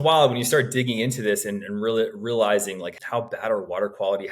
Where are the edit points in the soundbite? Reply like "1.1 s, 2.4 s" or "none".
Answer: 2.9 s